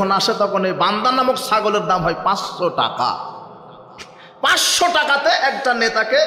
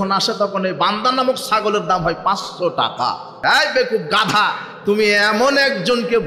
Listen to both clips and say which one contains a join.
second; 1 cut; at 3.4 s

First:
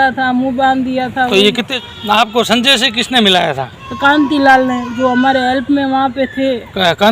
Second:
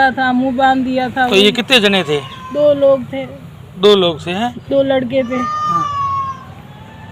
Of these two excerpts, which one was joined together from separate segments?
first; 1 cut; at 1.7 s

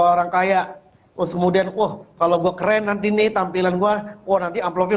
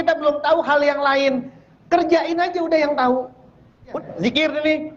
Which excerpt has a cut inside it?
second; 1 cut; at 3.9 s

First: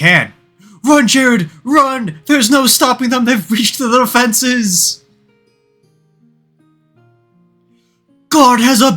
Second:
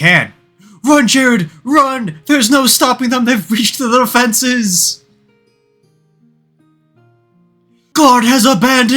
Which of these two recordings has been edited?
second; 1 cut; at 7.9 s

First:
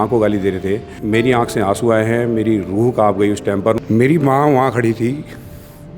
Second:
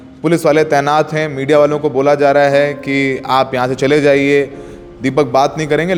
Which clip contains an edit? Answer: first; 2 cuts; at 0.9 s, 3.8 s

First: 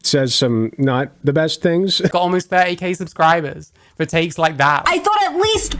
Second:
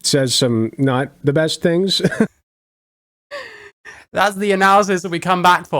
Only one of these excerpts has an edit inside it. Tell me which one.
first; 2 cuts; at 2.1 s, 4.8 s

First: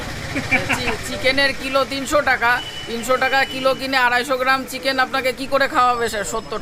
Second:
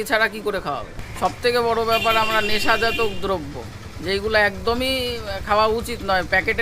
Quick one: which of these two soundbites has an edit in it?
second; 1 cut; at 0.9 s

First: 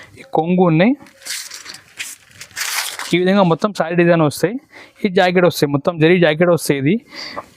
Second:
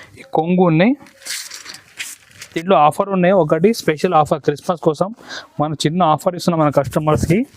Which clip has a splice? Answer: second; 1 cut; at 2.5 s

